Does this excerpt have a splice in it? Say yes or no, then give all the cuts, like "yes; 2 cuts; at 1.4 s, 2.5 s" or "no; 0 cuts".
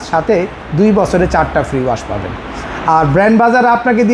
no; 0 cuts